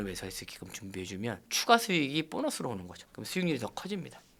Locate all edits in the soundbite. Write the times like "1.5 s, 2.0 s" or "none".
none